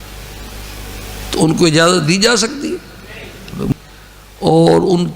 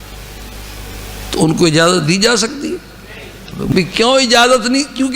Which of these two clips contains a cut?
first; 1 cut; at 3.7 s

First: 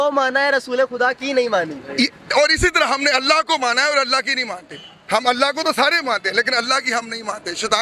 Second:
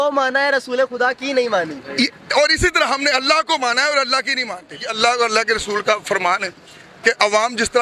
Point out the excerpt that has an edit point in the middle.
second; 1 cut; at 4.9 s

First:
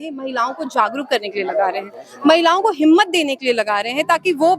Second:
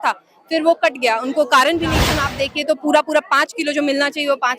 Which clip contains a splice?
second; 1 cut; at 2.2 s

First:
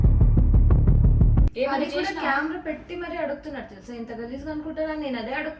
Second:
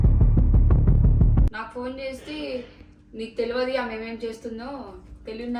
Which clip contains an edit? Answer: second; 1 cut; at 1.5 s

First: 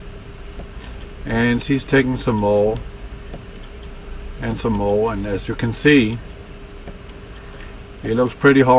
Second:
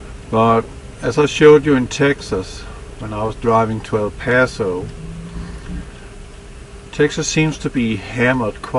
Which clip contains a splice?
first; 1 cut; at 1.5 s

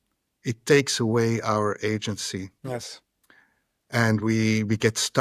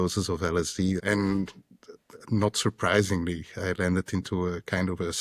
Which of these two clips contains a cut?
second; 1 cut; at 1.0 s

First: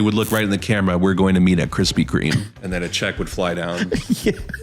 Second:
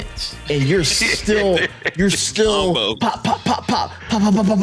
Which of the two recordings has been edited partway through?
first; 1 cut; at 2.5 s

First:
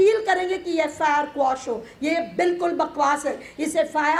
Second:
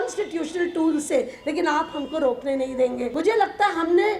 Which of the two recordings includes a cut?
second; 1 cut; at 3.1 s

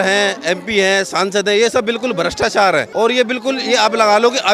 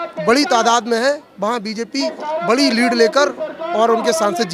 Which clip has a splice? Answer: first; 1 cut; at 2.9 s

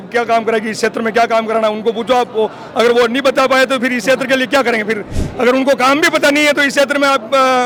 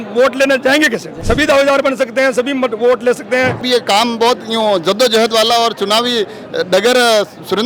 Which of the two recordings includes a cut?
second; 2 cuts; at 1.1 s, 3.6 s

